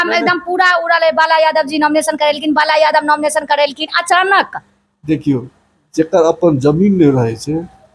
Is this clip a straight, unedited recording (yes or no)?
yes